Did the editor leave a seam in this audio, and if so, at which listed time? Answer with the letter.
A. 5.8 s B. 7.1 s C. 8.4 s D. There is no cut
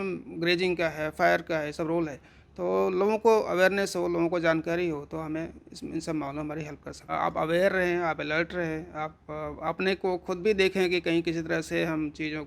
B